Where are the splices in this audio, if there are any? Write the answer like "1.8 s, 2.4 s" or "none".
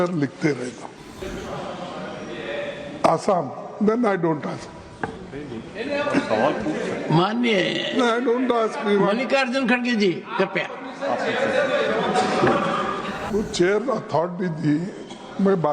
1.2 s, 13.3 s